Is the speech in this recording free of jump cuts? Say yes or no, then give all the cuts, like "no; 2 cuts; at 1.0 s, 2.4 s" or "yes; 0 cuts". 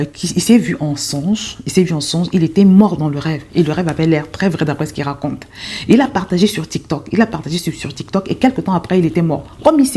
yes; 0 cuts